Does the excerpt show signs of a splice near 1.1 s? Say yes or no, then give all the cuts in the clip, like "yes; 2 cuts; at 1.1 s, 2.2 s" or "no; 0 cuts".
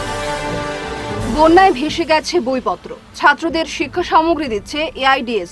yes; 1 cut; at 1.1 s